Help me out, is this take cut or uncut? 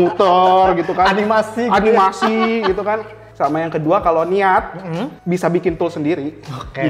cut